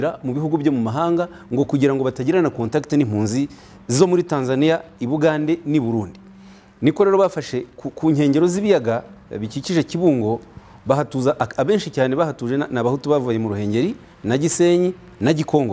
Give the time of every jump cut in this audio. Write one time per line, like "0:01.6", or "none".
none